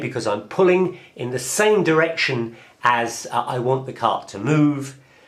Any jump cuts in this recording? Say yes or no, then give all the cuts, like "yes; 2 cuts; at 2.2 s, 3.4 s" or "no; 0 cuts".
no; 0 cuts